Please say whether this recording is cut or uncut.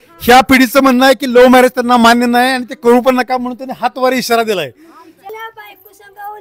cut